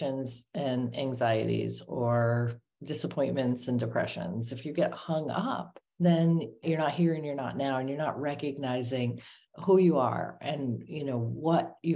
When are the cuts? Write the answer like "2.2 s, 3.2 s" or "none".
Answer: 2.7 s, 5.8 s, 6.6 s

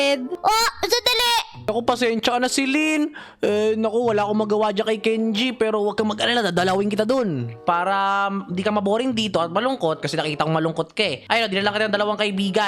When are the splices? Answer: 1.5 s, 7.5 s

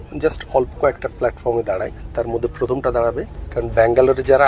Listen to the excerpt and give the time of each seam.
3.4 s

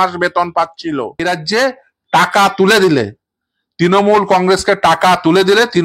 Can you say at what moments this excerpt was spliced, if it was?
1.2 s

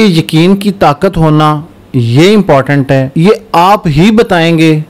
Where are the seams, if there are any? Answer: 3.1 s

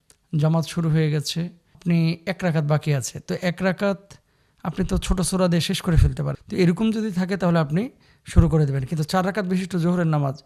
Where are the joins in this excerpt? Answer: 1.6 s, 6.3 s

